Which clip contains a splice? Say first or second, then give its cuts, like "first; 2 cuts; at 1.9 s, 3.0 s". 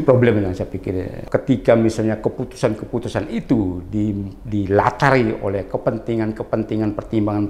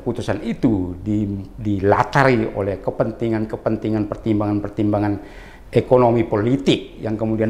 first; 1 cut; at 1.2 s